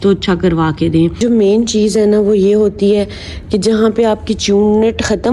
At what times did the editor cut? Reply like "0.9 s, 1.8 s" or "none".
1.2 s